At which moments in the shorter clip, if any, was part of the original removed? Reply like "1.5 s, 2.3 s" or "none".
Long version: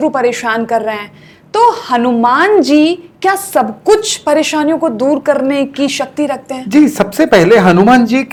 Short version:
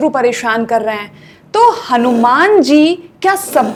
none